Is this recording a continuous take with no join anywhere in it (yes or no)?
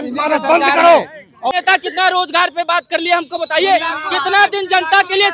no